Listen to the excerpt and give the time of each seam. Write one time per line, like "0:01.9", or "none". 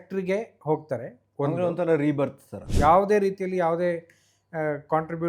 0:02.7